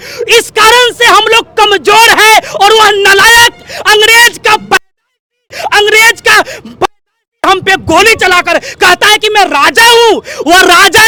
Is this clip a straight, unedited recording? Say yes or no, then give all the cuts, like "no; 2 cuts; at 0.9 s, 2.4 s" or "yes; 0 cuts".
yes; 0 cuts